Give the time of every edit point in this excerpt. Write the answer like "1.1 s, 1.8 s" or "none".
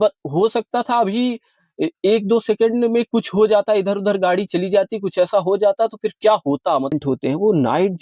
6.9 s